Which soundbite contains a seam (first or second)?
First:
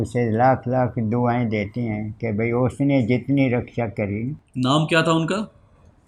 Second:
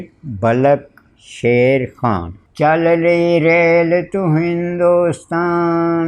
second